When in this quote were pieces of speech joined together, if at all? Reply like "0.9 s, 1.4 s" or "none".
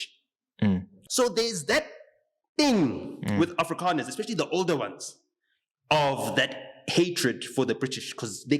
0.9 s